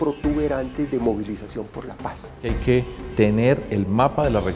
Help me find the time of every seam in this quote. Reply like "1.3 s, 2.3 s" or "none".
2.5 s